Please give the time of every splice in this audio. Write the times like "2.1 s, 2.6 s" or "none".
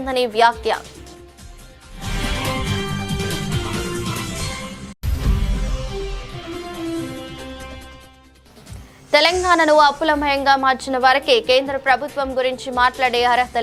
none